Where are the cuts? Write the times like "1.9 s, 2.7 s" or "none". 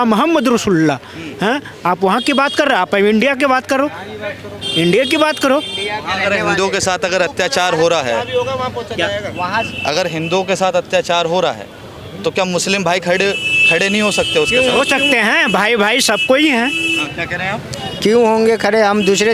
none